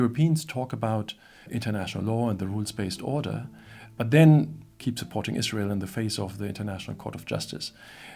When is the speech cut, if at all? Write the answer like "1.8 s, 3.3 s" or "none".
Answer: 1.5 s, 4.6 s

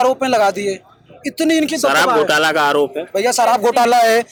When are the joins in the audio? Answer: none

